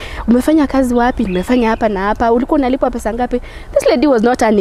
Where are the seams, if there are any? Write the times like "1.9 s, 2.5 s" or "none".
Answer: none